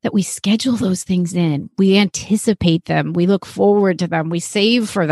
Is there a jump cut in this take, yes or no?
no